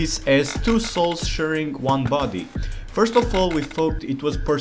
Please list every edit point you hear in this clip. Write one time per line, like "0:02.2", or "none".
none